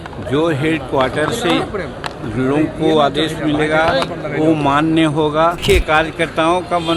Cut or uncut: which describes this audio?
cut